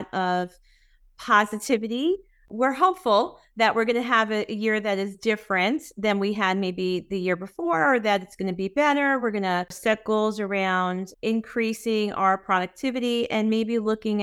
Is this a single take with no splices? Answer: no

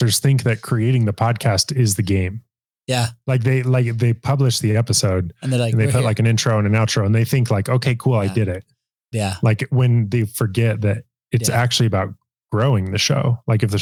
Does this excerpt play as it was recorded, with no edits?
yes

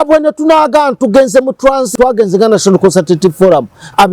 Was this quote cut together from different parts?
yes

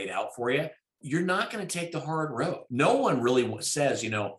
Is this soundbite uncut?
no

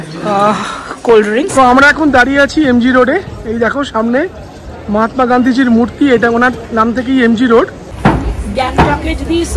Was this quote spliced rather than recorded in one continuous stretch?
yes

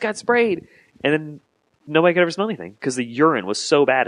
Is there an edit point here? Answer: yes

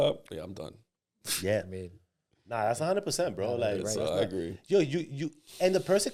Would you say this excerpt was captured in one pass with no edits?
yes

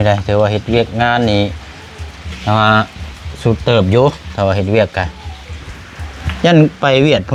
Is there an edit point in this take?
no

